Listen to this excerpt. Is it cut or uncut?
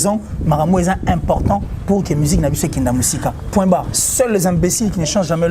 cut